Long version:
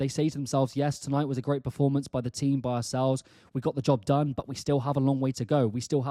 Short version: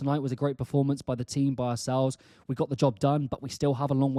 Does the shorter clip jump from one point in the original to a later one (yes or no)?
no